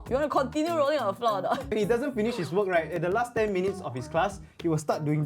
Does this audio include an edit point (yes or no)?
yes